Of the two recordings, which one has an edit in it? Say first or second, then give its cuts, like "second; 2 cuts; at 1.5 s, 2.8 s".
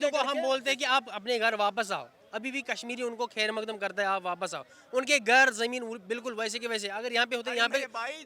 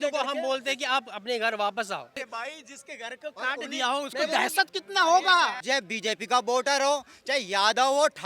second; 2 cuts; at 2.2 s, 5.6 s